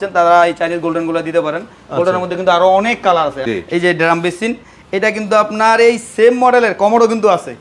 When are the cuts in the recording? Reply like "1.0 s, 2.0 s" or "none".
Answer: 3.4 s